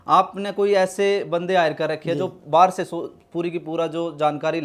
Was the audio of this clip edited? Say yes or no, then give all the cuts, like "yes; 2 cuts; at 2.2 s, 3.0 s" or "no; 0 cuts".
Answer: no; 0 cuts